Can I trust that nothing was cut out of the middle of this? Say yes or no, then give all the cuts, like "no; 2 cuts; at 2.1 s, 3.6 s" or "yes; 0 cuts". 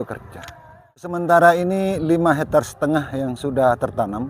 no; 1 cut; at 1.2 s